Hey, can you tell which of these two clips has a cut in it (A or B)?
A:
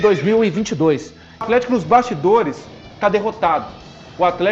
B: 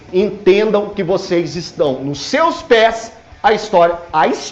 A